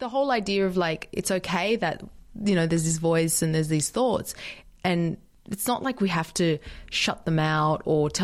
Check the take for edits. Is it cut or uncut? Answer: uncut